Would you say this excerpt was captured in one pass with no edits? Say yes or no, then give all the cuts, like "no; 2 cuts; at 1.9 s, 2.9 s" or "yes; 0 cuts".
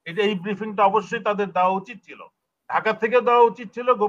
yes; 0 cuts